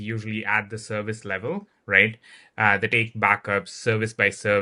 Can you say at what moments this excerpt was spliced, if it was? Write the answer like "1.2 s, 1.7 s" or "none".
none